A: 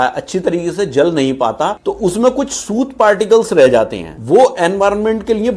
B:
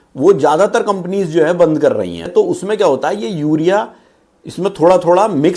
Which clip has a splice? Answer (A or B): B